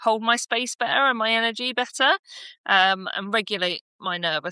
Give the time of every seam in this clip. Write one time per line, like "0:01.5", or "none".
none